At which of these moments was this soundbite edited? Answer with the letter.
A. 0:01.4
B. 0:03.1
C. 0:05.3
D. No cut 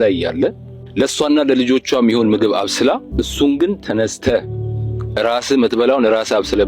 B